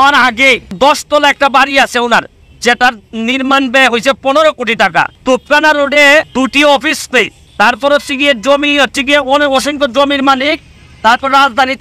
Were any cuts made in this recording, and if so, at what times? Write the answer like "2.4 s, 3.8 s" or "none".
0.7 s, 5.1 s, 6.3 s, 7.4 s